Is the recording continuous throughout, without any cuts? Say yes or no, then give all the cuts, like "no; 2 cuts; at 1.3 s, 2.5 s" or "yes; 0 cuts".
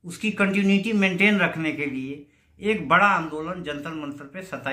yes; 0 cuts